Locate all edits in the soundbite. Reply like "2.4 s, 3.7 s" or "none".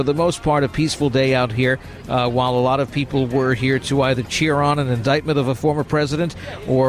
none